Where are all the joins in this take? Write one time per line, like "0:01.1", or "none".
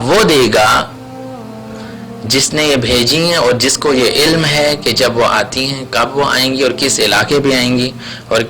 none

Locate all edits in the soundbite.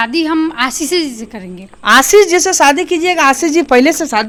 none

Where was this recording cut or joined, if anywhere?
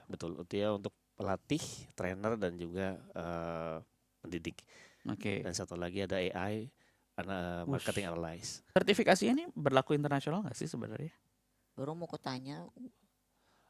0:08.7

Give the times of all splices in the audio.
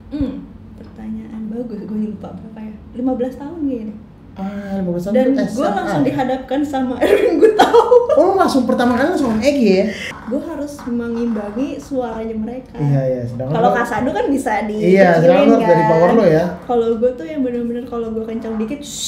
0:10.1

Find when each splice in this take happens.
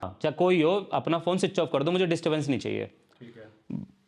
none

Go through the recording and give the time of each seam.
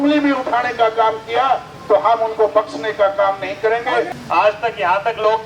0:04.1

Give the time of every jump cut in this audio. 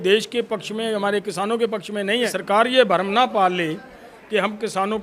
0:02.4

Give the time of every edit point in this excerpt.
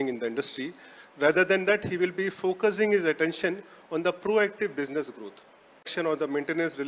0:05.9

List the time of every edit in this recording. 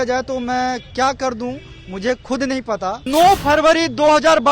0:03.0

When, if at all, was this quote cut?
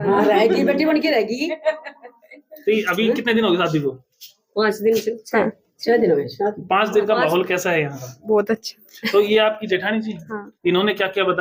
none

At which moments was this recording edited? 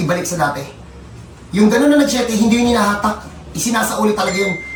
none

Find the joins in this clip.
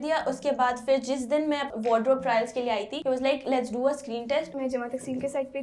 0:01.7
0:02.9
0:04.5

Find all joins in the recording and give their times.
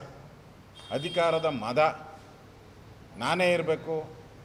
none

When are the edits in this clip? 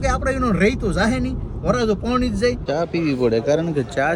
0:02.6

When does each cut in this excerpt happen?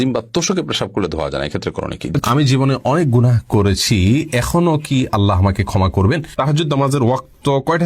0:02.0
0:06.3

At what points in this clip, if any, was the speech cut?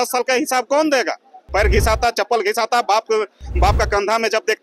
0:01.3

